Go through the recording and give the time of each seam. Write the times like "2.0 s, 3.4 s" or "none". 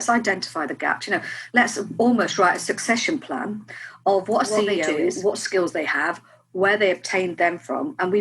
4.9 s